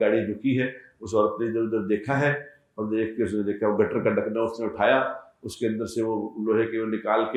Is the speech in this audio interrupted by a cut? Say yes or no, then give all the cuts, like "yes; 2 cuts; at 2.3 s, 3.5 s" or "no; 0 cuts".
no; 0 cuts